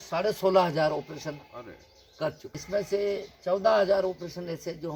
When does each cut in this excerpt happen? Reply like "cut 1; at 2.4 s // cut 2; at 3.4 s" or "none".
cut 1; at 2.6 s